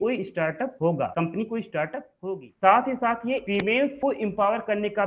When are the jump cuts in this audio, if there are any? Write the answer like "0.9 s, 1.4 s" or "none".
0.9 s, 2.1 s, 3.8 s